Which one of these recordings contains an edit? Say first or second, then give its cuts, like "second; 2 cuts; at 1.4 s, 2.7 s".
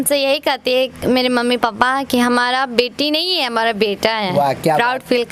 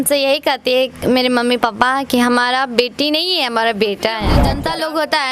second; 1 cut; at 4.3 s